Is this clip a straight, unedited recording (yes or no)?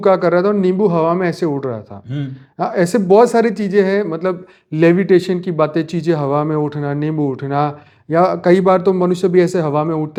yes